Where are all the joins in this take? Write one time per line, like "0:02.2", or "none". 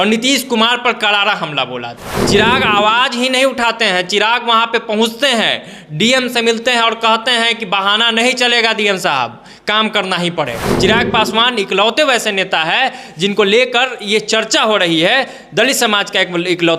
0:02.1
0:10.6